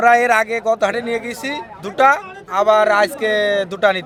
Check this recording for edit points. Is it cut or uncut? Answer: uncut